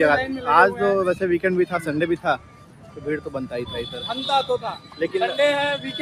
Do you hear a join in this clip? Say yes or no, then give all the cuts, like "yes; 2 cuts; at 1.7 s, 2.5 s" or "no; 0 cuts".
no; 0 cuts